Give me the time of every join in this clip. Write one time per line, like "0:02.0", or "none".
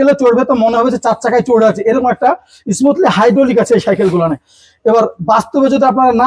none